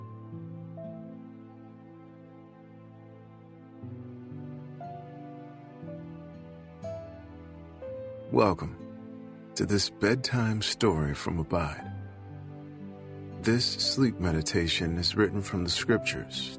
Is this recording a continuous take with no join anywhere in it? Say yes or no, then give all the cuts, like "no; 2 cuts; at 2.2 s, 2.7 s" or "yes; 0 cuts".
yes; 0 cuts